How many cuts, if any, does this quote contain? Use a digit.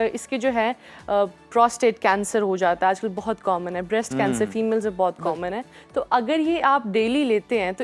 0